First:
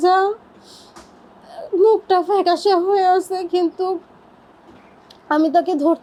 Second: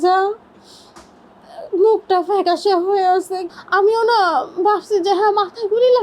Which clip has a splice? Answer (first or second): second